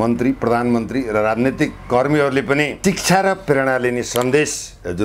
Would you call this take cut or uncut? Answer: cut